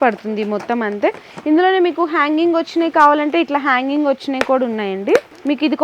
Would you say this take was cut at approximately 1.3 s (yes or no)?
no